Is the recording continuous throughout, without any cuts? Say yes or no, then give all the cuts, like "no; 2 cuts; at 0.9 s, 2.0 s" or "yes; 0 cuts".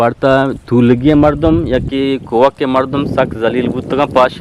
yes; 0 cuts